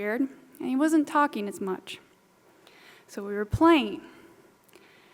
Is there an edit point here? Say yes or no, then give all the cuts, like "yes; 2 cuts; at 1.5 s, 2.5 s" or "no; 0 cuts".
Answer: no; 0 cuts